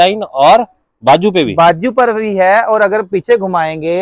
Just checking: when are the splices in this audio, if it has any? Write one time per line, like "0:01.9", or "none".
none